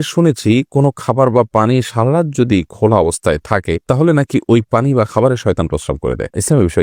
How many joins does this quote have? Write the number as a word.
zero